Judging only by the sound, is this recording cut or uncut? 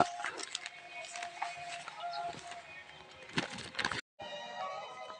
cut